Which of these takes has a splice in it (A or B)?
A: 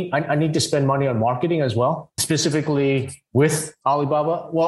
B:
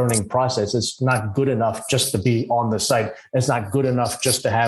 A